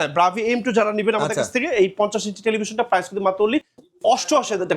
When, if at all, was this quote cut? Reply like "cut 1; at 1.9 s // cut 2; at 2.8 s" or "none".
cut 1; at 3.8 s